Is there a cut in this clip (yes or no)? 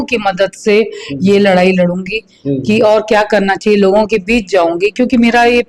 no